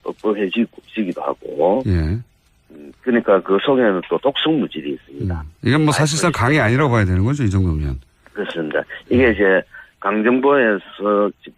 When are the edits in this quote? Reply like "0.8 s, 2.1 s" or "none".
3.3 s